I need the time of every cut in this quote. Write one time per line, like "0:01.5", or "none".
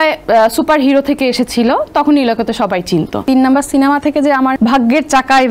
0:03.2
0:04.5

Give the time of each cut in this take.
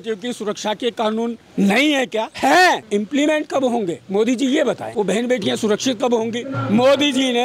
0:01.4
0:02.3
0:02.8
0:04.8
0:06.5

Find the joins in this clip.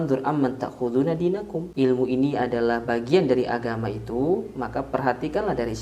0:01.6

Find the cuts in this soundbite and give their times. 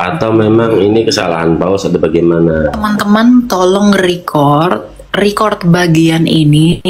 0:02.8

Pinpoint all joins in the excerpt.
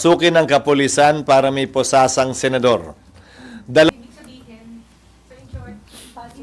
0:03.9

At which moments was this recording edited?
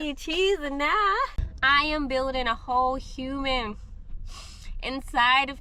0:01.4

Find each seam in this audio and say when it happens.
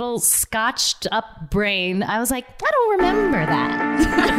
none

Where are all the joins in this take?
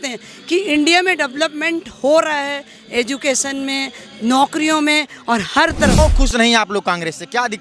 0:06.0

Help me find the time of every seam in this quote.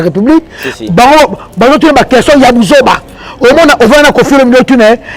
none

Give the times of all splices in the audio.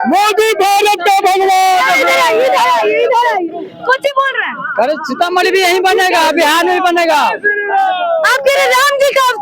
none

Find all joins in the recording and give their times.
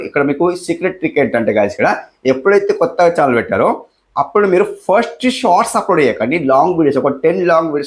none

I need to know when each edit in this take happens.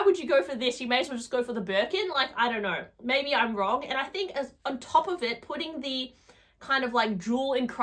none

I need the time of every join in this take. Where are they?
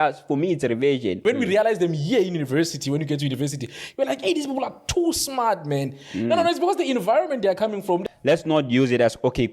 0:01.2
0:08.0

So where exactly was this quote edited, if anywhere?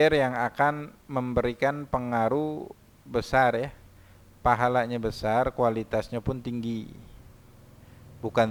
none

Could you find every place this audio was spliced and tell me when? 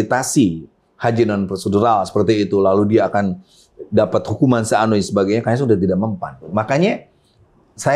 0:06.4

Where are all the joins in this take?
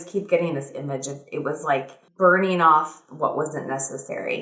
0:02.0

